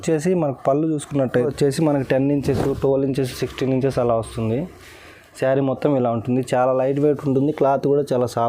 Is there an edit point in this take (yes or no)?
yes